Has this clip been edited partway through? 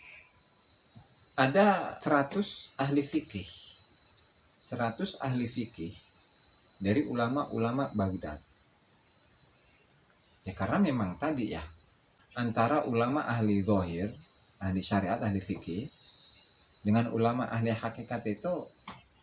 yes; 2 cuts; at 1.9 s, 12.2 s

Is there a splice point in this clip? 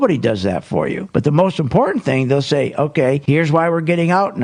no; 0 cuts

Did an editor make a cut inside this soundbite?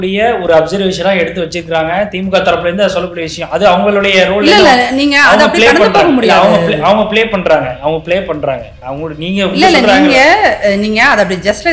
yes; 1 cut; at 8.8 s

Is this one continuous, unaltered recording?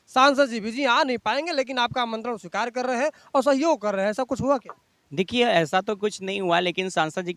yes; 0 cuts

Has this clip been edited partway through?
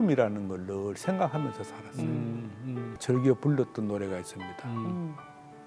yes; 1 cut; at 3.0 s

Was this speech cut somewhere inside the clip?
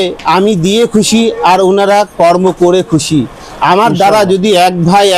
no; 0 cuts

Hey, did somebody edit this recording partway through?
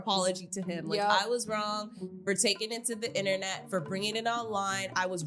no; 0 cuts

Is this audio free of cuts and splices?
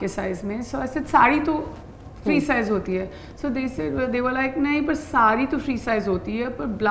yes; 0 cuts

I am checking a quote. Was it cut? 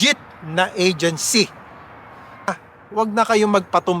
yes; 1 cut; at 2.5 s

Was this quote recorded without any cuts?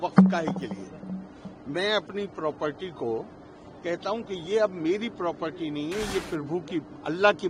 yes; 0 cuts

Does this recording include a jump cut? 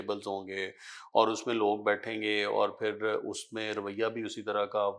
no; 0 cuts

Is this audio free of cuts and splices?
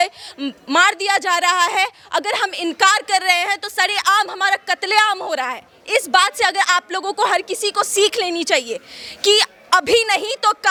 yes; 0 cuts

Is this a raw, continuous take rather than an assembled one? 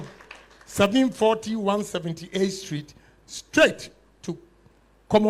yes; 0 cuts

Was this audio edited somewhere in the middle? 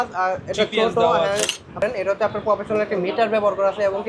yes; 1 cut; at 1.8 s

